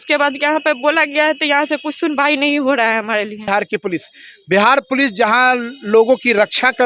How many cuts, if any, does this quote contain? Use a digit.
1